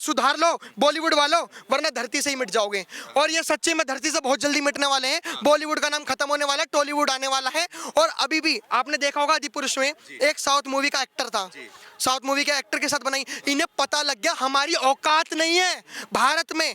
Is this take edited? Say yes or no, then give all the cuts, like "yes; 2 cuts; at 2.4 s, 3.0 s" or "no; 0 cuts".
no; 0 cuts